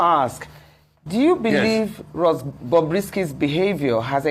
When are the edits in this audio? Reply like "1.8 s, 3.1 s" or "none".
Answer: none